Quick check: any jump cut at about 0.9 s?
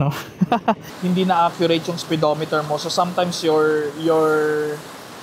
yes; 1 cut; at 0.9 s

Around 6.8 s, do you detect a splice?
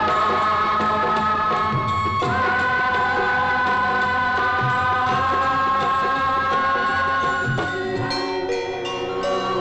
no; 0 cuts

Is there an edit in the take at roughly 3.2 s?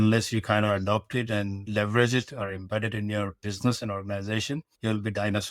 no; 2 cuts; at 1.6 s, 4.7 s

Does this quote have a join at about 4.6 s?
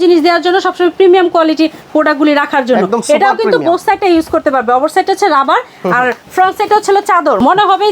no; 0 cuts

